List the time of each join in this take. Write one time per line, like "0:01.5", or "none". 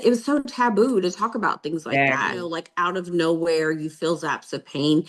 0:02.6